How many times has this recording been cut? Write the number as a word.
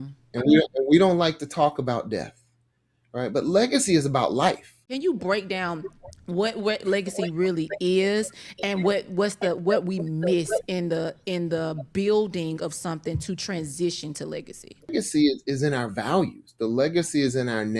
two